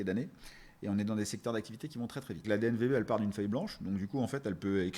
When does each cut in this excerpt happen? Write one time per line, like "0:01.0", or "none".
0:02.4